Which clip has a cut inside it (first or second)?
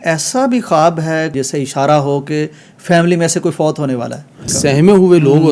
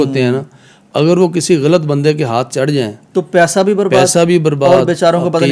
first